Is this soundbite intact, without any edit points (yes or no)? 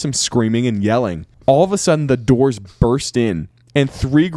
yes